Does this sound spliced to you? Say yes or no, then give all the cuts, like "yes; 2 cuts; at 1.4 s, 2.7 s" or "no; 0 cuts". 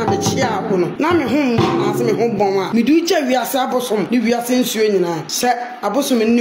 yes; 4 cuts; at 0.9 s, 2.7 s, 4.1 s, 5.2 s